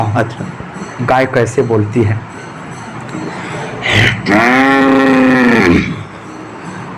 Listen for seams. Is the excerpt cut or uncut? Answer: uncut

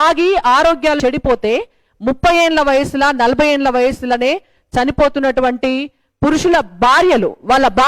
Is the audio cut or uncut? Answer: cut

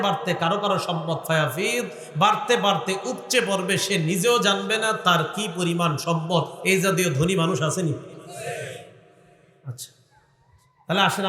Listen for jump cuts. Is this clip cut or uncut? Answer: uncut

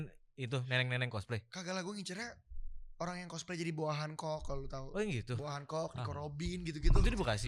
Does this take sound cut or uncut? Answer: uncut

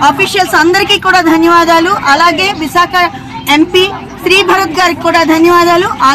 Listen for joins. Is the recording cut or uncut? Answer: uncut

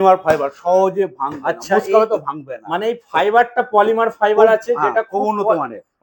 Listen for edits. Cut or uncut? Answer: uncut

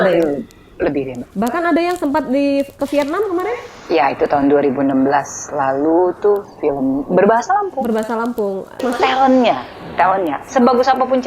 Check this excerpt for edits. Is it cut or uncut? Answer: cut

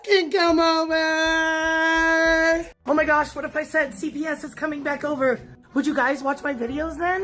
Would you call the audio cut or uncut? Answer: cut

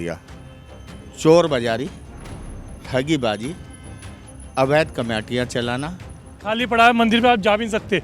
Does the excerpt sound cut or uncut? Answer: cut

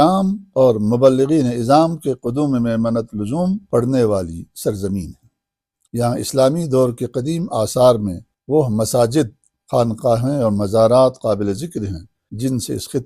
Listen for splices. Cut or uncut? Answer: uncut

